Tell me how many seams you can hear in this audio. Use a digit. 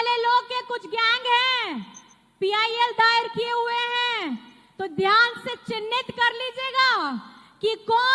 0